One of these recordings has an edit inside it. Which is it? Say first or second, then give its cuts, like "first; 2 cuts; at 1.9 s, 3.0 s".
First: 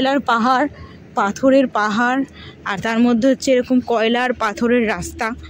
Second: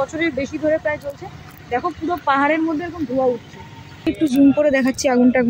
second; 1 cut; at 4.1 s